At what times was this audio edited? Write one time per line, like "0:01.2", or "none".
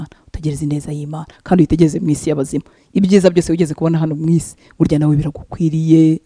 none